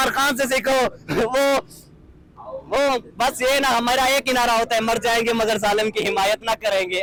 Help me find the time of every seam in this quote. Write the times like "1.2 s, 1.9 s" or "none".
none